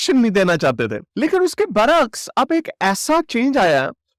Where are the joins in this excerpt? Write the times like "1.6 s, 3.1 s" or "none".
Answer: none